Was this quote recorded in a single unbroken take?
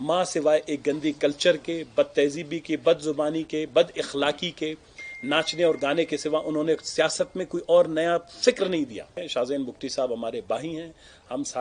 no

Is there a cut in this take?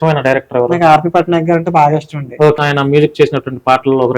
yes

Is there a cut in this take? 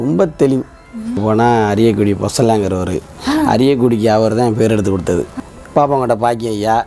yes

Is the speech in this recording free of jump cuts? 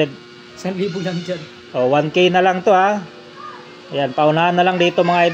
yes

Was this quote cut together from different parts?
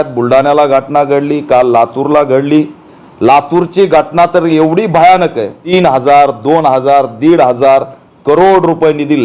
yes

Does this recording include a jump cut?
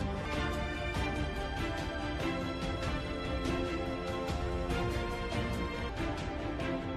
no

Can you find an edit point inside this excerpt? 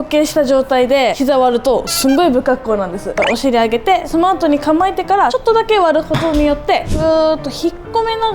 yes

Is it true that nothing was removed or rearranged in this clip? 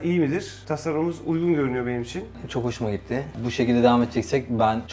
no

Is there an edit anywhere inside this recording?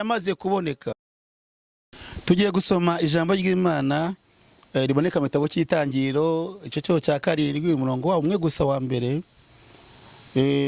yes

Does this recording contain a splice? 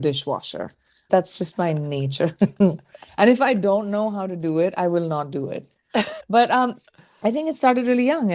yes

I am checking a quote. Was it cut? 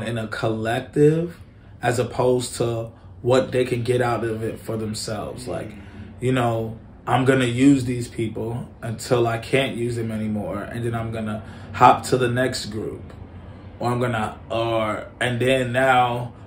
no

